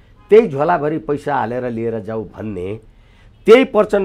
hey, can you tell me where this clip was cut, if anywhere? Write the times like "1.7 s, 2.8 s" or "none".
none

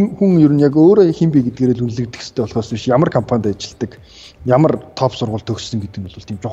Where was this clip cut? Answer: none

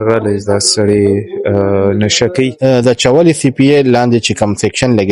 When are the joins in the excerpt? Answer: 2.6 s

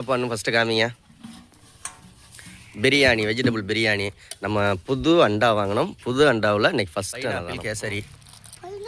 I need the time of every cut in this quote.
7.5 s

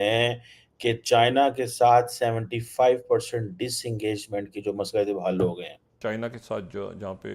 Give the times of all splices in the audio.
6.0 s

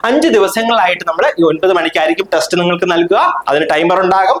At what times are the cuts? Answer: none

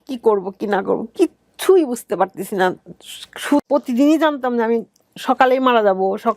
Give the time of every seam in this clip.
3.6 s

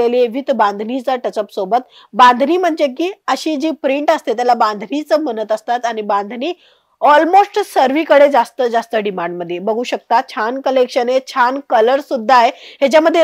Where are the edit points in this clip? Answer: none

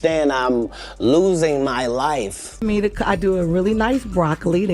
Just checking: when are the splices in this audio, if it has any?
2.6 s

